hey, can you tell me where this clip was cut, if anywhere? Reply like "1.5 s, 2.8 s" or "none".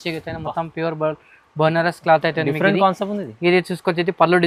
none